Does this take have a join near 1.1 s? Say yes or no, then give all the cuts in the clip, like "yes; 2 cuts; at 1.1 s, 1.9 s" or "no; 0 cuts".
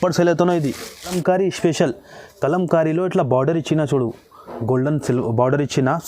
yes; 1 cut; at 1.1 s